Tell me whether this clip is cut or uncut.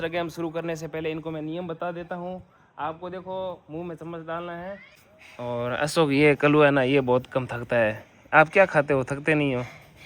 cut